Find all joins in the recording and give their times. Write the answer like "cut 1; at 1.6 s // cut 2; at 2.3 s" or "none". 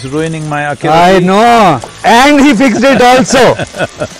cut 1; at 1.9 s